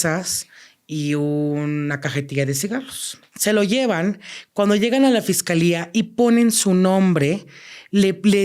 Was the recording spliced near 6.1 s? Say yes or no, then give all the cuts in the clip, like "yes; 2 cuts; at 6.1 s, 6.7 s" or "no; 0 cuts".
no; 1 cut; at 3.2 s